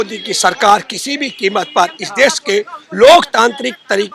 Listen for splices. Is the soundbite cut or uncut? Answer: uncut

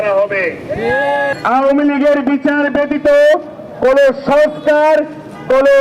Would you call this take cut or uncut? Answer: cut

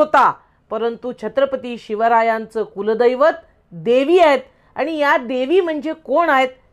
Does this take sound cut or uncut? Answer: uncut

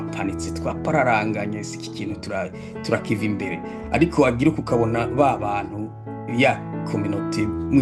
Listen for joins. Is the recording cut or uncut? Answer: uncut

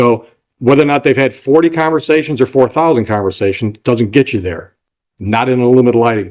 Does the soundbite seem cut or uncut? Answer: uncut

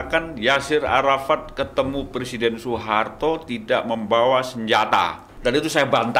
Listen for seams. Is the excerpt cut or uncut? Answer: cut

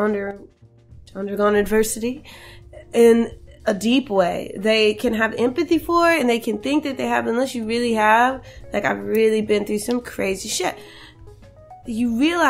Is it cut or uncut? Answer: cut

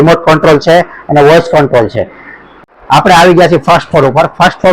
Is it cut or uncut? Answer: cut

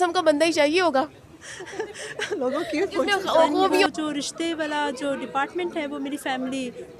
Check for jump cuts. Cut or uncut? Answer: cut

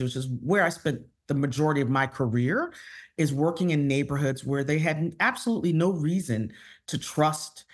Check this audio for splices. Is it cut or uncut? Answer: uncut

